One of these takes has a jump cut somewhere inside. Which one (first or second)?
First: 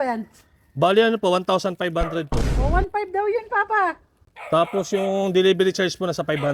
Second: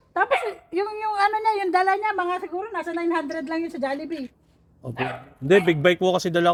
first